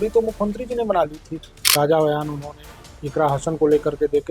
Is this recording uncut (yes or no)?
no